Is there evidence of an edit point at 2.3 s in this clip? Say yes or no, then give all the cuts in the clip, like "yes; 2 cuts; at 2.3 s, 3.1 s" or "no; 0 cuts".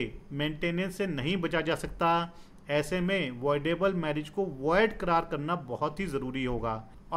no; 0 cuts